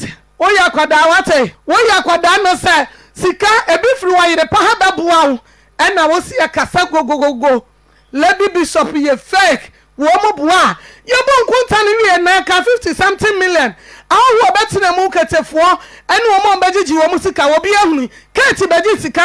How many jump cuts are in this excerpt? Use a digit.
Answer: 1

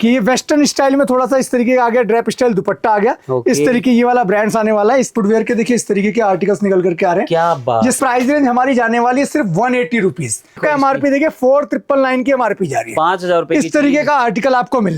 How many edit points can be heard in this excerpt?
3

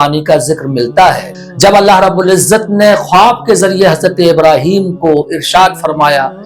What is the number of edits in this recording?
1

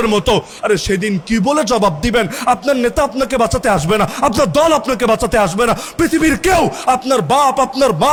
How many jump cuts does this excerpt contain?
0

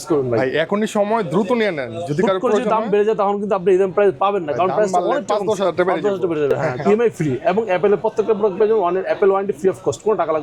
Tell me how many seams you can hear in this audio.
1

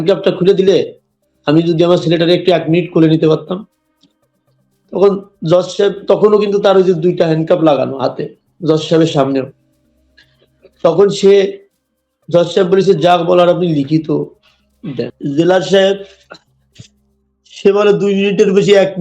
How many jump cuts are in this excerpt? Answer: 1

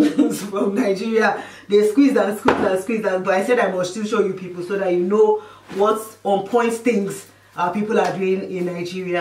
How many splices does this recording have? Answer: 0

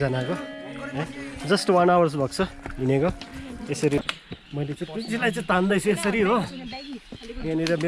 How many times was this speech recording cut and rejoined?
1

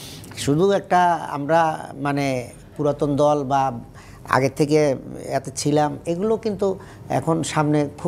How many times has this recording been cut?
0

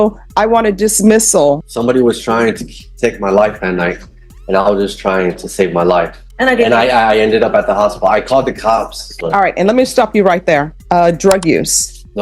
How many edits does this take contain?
4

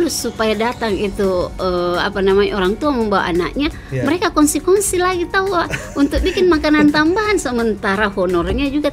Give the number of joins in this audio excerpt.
0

